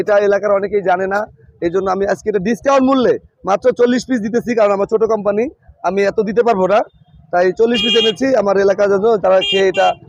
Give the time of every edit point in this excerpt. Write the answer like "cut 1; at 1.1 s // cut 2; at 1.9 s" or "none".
none